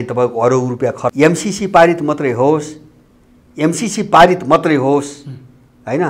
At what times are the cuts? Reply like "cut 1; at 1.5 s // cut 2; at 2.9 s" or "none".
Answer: cut 1; at 1.1 s